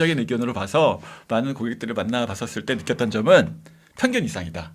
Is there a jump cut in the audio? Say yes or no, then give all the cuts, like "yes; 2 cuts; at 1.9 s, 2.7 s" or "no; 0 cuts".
no; 0 cuts